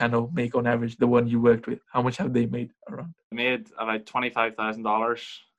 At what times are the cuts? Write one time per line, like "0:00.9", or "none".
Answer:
0:03.3